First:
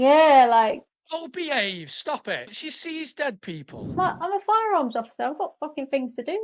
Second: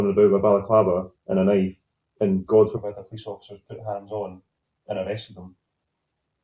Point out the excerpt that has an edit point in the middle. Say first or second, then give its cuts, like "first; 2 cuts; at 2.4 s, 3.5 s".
first; 3 cuts; at 0.9 s, 2.5 s, 4.0 s